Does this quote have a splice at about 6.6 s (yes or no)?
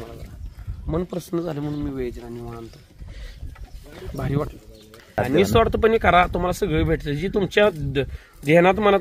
no